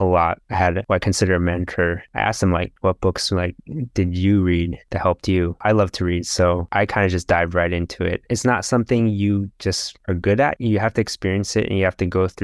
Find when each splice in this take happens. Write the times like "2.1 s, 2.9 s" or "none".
5.6 s, 8.2 s, 10.5 s